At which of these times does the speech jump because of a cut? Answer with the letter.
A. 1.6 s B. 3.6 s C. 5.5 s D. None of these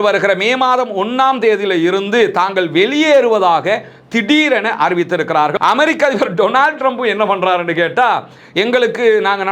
C